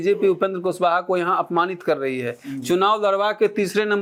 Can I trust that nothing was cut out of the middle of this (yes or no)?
yes